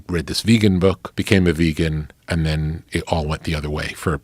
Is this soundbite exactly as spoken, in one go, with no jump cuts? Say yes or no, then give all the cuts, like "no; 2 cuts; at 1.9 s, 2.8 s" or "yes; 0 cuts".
no; 1 cut; at 1.1 s